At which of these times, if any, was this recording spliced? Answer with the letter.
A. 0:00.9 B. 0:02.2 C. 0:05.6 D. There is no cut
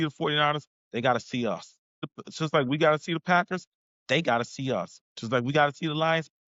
B